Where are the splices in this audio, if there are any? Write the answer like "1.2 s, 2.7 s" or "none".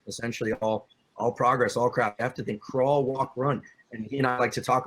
1.0 s, 3.7 s